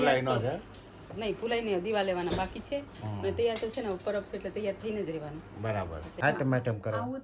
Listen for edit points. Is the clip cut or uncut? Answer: cut